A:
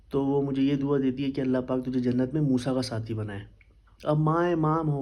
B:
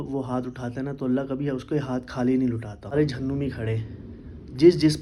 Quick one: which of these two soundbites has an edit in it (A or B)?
B